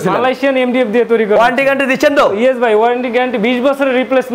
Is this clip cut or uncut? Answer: uncut